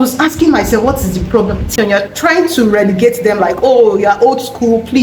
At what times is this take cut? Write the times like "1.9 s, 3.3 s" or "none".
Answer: 1.7 s